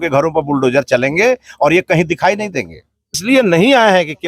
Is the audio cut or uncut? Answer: cut